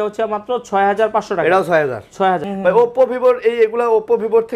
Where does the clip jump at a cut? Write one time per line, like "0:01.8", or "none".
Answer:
0:02.5